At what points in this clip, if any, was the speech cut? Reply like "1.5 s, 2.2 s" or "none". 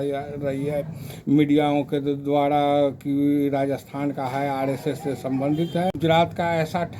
5.9 s